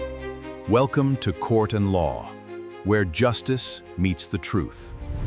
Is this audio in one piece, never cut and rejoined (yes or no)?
yes